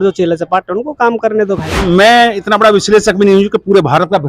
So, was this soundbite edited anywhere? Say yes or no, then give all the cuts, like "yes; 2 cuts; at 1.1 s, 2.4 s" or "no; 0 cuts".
yes; 1 cut; at 1.7 s